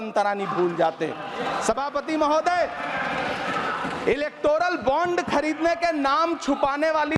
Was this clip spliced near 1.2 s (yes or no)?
no